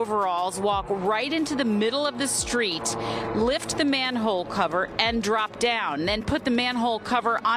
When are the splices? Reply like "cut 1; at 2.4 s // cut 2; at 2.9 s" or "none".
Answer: none